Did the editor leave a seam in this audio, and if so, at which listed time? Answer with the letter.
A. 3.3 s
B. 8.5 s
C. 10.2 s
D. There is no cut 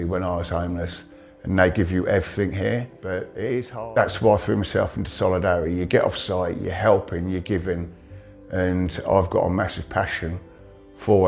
A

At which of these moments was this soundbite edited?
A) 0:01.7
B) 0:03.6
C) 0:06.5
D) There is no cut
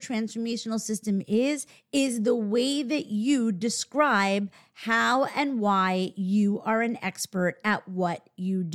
A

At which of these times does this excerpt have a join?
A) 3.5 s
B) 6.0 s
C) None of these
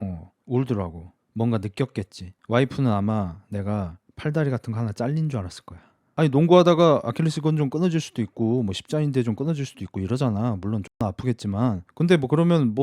B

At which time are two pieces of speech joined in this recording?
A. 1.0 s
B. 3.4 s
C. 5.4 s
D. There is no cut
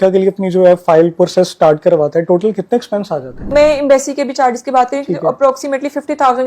B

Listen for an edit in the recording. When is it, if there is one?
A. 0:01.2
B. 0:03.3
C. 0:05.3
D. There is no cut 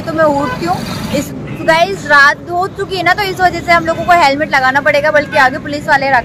A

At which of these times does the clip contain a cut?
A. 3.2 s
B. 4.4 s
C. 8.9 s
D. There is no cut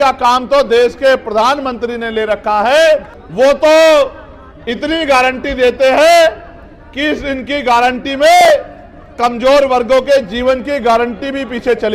A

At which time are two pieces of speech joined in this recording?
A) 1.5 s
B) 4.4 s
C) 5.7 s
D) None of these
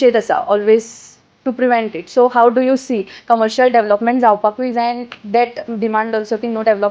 D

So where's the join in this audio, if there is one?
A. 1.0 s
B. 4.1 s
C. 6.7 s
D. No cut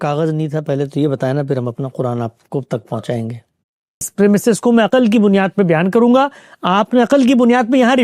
B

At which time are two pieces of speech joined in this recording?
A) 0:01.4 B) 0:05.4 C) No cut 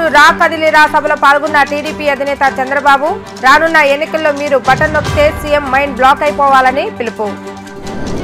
C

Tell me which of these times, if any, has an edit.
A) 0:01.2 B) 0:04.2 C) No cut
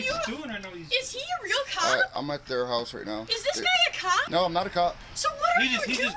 B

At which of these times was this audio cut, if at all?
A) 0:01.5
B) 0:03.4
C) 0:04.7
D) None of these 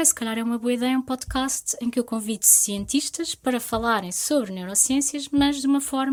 D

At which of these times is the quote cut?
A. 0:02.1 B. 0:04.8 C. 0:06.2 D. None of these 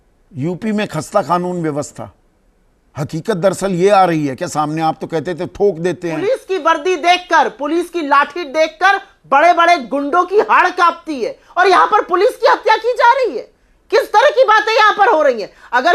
C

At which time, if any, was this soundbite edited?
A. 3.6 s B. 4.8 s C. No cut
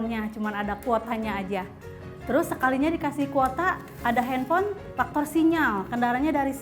B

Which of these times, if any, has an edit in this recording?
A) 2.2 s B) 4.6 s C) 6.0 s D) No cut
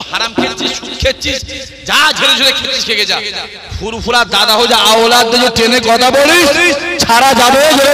D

